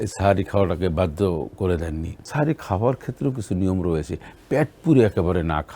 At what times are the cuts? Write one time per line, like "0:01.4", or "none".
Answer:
0:02.2

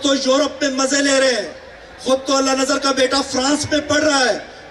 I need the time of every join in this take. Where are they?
none

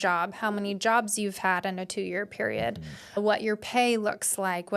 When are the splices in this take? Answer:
0:03.2

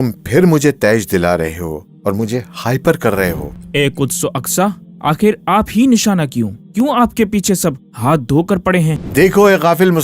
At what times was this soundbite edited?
0:03.5
0:09.0

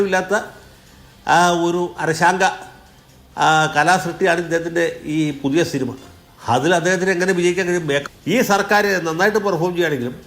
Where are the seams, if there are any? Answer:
0:08.1

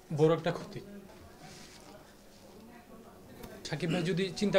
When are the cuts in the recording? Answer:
0:01.1
0:03.7

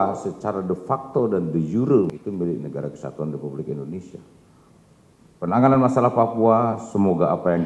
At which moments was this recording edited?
0:02.1

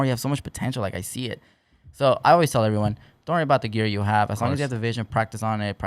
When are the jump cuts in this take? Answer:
none

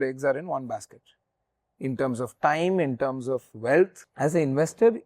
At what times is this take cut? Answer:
0:04.0

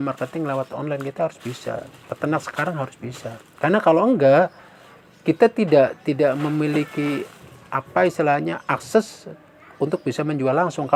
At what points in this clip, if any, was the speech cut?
none

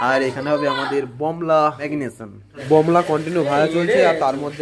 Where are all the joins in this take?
0:02.3

